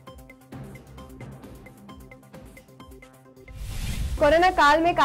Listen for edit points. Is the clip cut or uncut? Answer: cut